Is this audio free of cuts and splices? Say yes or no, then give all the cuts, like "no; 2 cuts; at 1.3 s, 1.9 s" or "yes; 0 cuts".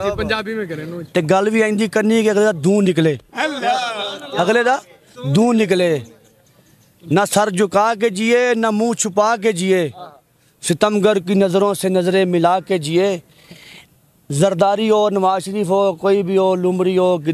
yes; 0 cuts